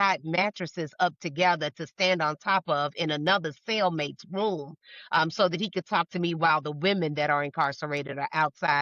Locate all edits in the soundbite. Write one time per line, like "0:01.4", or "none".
none

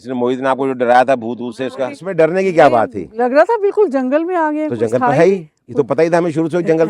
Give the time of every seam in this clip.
0:02.0

